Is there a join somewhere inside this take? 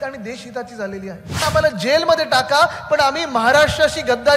yes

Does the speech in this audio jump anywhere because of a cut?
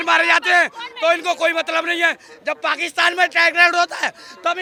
no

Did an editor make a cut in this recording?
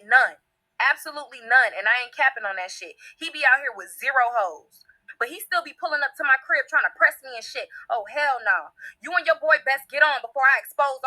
yes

